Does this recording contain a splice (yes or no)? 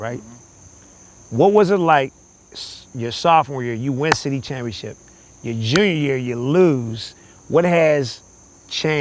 no